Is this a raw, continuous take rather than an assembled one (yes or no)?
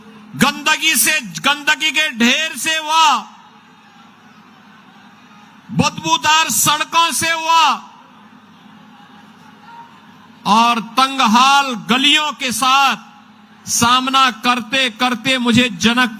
yes